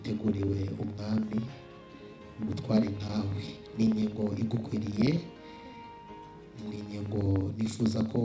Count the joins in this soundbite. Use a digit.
0